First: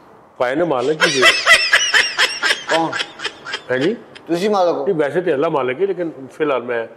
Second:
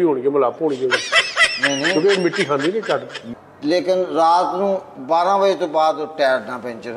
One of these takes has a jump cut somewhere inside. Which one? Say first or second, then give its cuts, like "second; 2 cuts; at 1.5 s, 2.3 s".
second; 1 cut; at 3.2 s